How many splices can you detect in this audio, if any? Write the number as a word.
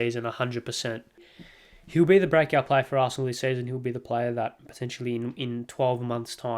one